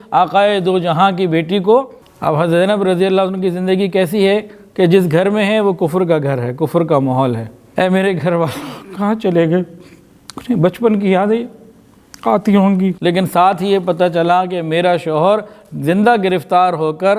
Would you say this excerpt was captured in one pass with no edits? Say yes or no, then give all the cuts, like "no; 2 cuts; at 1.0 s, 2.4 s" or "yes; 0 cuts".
no; 3 cuts; at 2.0 s, 7.5 s, 13.0 s